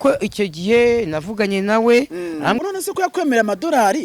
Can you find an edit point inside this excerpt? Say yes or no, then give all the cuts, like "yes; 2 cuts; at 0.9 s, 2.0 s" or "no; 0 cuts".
yes; 1 cut; at 2.6 s